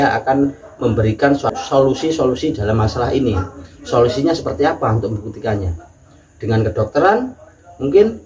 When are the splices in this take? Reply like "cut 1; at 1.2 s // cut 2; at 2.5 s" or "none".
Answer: cut 1; at 1.5 s